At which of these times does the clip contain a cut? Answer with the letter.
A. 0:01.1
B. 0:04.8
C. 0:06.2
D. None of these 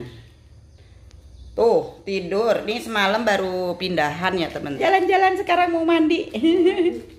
B